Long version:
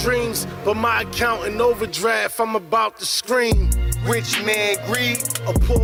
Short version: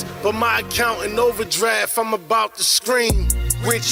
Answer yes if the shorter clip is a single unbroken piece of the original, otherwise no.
yes